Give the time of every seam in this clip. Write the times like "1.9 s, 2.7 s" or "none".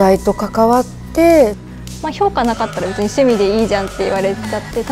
1.6 s